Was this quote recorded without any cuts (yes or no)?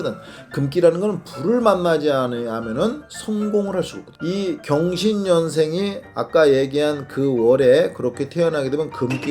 no